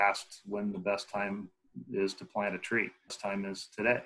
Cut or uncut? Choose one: cut